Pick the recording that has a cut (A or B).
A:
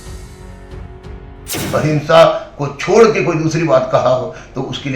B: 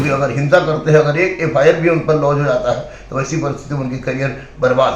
A